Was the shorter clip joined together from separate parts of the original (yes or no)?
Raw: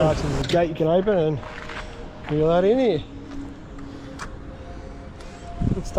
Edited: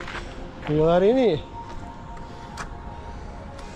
no